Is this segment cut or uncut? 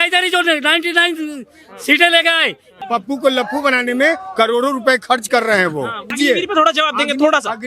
cut